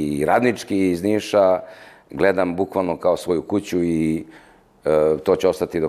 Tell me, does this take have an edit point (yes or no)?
no